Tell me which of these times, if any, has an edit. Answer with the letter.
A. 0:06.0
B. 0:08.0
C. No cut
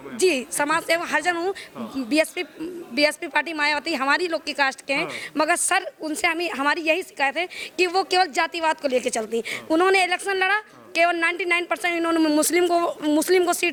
C